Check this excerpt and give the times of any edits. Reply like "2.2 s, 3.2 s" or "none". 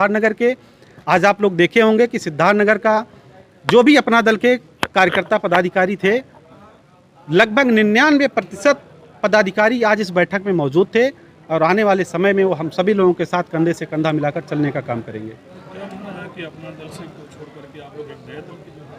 none